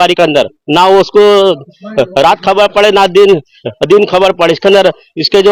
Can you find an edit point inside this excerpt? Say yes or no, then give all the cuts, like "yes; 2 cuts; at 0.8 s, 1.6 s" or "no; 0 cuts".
no; 0 cuts